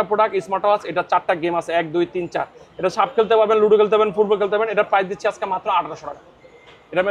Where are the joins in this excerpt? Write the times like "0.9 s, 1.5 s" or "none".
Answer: none